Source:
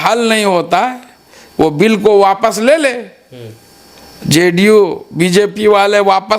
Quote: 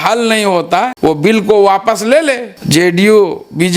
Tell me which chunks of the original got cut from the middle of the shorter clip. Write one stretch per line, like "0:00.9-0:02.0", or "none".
0:00.9-0:01.5
0:03.1-0:04.1